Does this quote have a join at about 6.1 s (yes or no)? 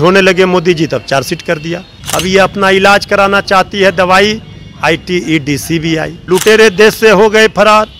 yes